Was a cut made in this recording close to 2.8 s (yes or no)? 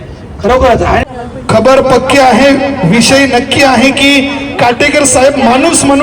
no